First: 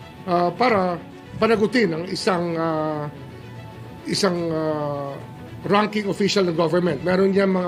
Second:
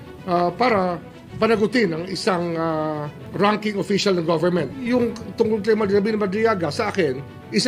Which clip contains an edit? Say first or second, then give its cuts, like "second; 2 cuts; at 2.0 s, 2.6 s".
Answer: second; 2 cuts; at 3.2 s, 4.7 s